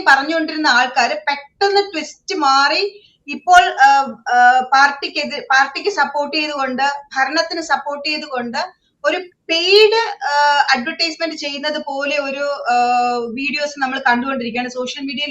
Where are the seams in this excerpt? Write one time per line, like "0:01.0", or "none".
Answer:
none